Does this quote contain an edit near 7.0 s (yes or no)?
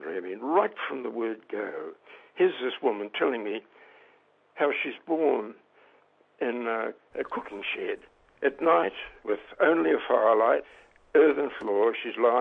yes